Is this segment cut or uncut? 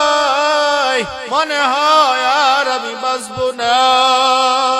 cut